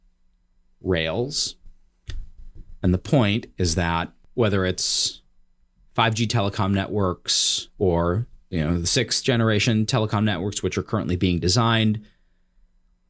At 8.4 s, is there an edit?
no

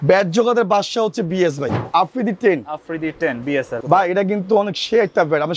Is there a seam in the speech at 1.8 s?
yes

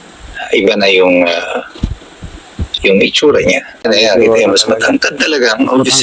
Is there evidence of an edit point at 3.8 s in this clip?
yes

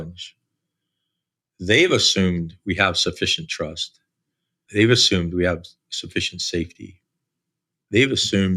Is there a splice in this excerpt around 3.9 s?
no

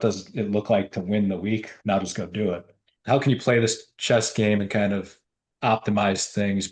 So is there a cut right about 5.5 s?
no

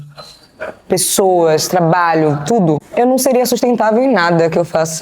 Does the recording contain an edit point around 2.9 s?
yes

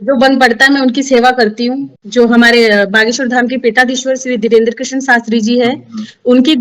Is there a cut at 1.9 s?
yes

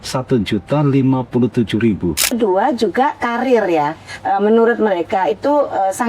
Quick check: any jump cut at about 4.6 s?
no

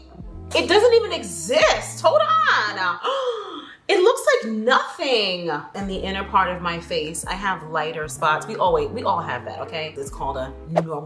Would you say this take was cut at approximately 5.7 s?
yes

